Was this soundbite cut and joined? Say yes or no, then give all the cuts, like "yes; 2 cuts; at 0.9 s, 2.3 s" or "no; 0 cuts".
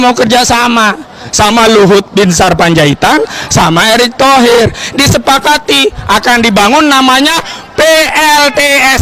no; 0 cuts